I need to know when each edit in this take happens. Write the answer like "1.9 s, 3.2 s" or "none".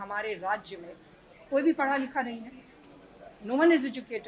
none